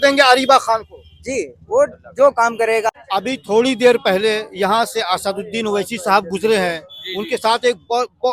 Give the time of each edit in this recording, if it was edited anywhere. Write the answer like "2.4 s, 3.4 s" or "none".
none